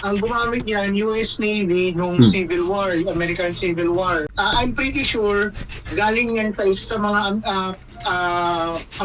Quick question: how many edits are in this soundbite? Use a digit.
1